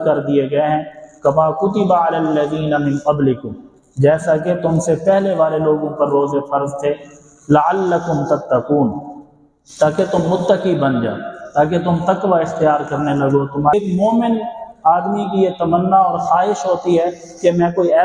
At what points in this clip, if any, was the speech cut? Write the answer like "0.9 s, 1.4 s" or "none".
13.7 s

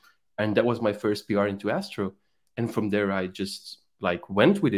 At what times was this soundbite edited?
none

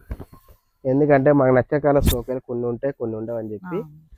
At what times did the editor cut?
none

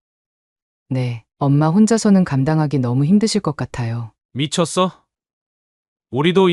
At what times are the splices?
none

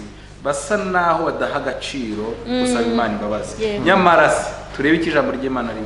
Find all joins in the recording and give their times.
none

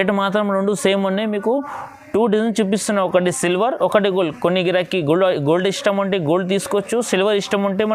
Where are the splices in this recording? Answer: none

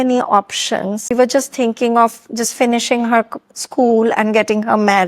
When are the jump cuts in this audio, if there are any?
1.1 s

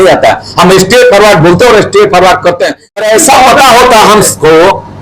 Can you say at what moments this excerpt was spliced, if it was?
3.0 s

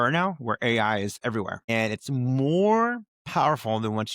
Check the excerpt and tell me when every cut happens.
1.7 s, 3.1 s

